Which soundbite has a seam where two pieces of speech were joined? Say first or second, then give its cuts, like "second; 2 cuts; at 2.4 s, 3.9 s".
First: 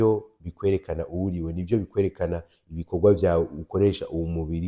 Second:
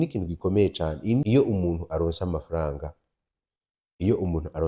second; 1 cut; at 1.2 s